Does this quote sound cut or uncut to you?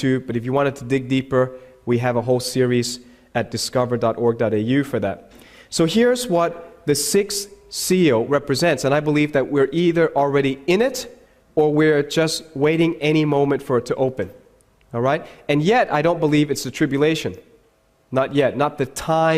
uncut